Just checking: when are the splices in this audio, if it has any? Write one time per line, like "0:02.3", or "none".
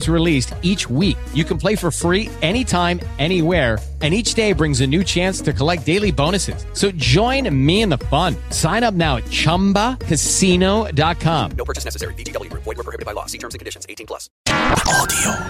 0:14.4

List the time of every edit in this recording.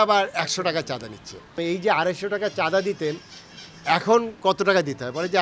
0:01.6

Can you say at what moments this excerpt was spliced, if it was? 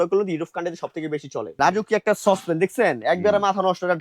0:01.5

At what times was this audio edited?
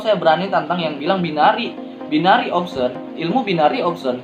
none

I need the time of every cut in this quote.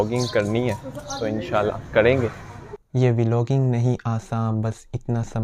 0:02.7

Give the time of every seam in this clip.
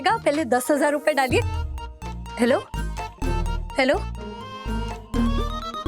none

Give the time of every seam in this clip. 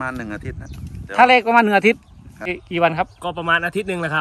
0:02.6

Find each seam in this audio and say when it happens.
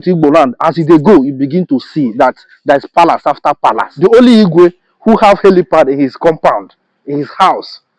0:03.9

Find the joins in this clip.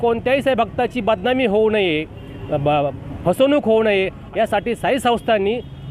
0:04.2

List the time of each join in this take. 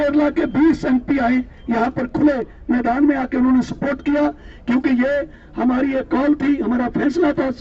none

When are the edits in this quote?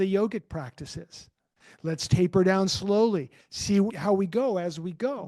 0:04.0

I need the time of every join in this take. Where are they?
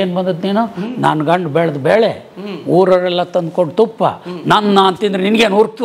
none

